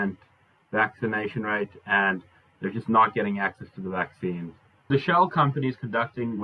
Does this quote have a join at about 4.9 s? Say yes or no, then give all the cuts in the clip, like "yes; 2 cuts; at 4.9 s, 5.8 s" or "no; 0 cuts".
yes; 1 cut; at 4.9 s